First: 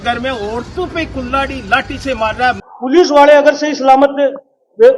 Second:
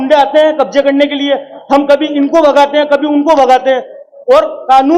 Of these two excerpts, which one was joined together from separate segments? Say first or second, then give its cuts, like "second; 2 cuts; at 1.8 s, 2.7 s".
first; 1 cut; at 2.7 s